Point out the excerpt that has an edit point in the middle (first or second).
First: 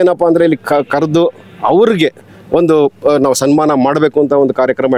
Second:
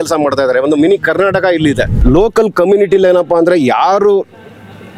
second